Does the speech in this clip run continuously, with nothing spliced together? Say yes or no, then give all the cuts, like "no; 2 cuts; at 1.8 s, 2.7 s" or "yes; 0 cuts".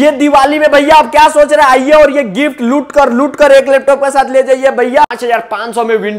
no; 1 cut; at 5.0 s